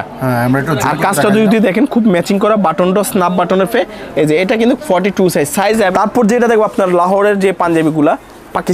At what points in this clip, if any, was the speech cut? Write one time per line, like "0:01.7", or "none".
0:05.9